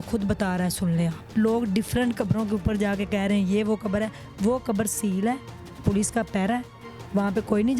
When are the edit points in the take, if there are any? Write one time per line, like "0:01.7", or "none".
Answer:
0:01.2